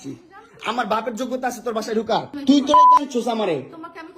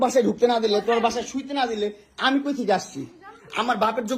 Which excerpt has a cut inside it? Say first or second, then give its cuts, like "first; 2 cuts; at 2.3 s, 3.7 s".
first; 1 cut; at 2.3 s